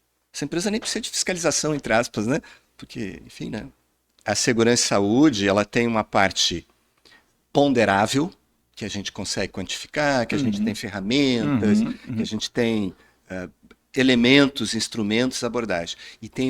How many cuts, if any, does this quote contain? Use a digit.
1